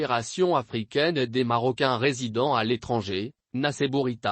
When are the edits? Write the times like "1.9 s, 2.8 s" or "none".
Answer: 3.4 s

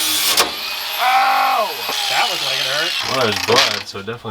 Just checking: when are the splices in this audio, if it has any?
2.0 s, 3.0 s

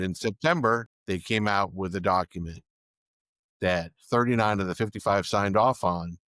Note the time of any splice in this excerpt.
0.9 s

